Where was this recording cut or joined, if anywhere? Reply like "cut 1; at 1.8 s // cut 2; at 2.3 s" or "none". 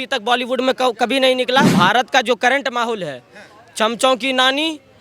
cut 1; at 1.7 s